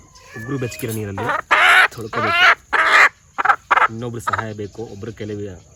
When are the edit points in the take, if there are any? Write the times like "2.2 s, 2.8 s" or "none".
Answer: none